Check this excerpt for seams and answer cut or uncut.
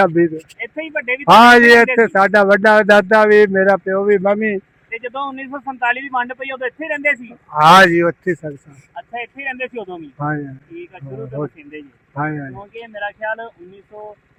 uncut